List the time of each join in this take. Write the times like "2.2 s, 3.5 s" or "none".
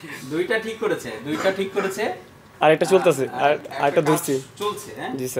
none